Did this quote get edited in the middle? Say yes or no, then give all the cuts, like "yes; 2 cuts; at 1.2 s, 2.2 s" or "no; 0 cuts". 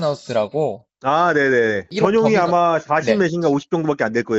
yes; 1 cut; at 1.9 s